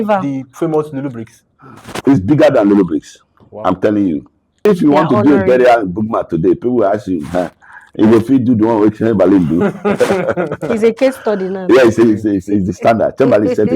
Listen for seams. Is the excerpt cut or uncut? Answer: cut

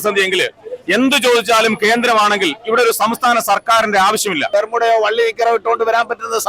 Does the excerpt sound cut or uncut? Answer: cut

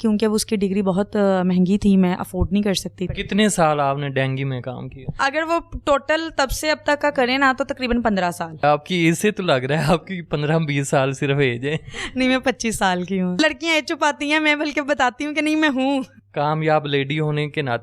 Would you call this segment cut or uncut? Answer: cut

